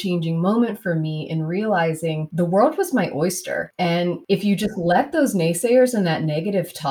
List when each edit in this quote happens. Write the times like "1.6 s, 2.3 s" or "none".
2.2 s, 4.1 s